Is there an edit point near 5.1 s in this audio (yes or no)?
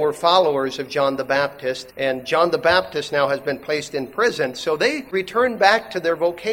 yes